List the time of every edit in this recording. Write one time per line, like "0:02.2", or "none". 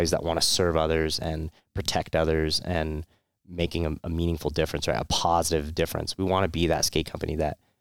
none